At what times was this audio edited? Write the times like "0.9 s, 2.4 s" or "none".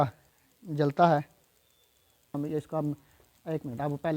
2.3 s